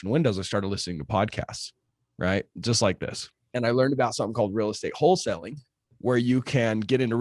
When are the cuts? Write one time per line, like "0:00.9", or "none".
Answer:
0:03.5